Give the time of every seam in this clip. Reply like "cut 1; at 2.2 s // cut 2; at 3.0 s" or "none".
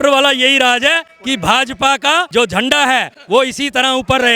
cut 1; at 1.1 s // cut 2; at 2.3 s // cut 3; at 3.1 s

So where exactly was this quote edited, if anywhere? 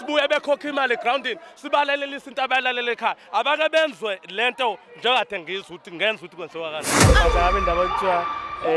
cut 1; at 7.0 s

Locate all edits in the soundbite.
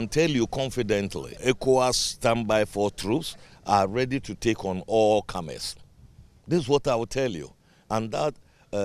cut 1; at 1.3 s

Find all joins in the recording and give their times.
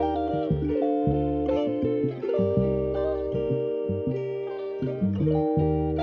none

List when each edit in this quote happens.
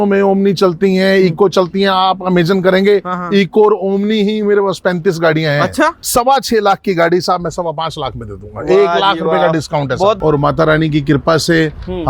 cut 1; at 6.0 s // cut 2; at 10.2 s

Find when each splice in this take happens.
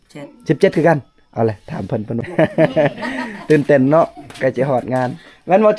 cut 1; at 2.1 s

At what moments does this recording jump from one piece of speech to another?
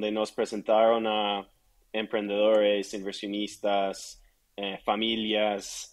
none

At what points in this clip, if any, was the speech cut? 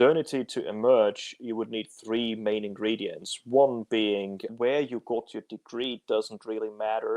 cut 1; at 4.5 s

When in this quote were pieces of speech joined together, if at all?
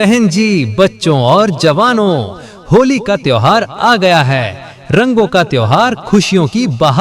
cut 1; at 2.2 s

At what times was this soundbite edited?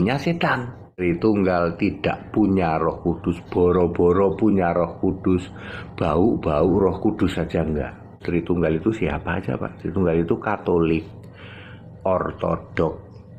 cut 1; at 1.0 s // cut 2; at 8.2 s

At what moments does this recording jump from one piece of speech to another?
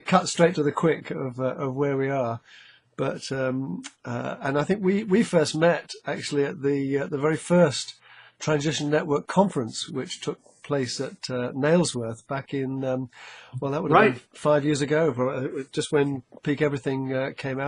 cut 1; at 3.8 s

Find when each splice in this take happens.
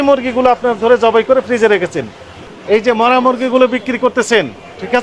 cut 1; at 2.4 s

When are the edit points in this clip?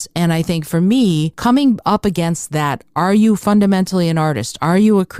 cut 1; at 1.3 s

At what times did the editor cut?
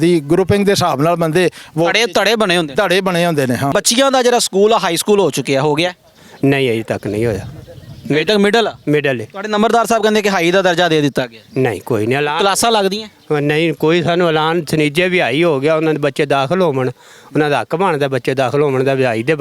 cut 1; at 3.7 s

